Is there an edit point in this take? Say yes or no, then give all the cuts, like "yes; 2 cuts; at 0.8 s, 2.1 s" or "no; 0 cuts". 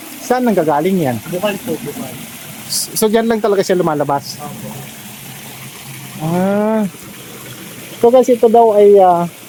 no; 0 cuts